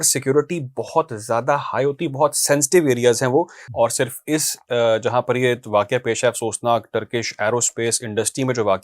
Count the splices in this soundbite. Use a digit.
1